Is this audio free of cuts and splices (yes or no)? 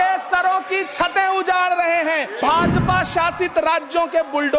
no